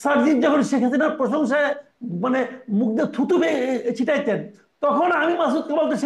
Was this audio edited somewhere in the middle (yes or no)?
no